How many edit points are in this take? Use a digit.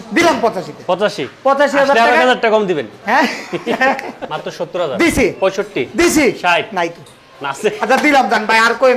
1